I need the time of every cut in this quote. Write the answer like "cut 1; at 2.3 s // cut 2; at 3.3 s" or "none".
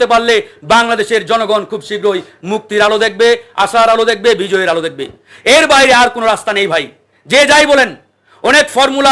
none